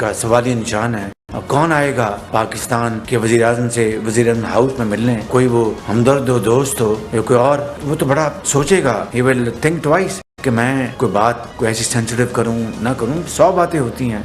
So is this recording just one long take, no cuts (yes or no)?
yes